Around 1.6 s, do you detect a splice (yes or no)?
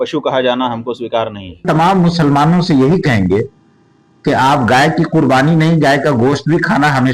yes